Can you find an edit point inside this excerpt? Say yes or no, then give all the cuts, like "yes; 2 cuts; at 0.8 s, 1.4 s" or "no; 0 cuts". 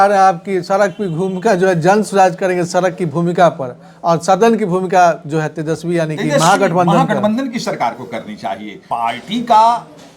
yes; 1 cut; at 8.8 s